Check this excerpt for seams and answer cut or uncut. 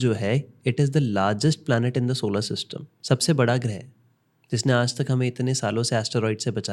uncut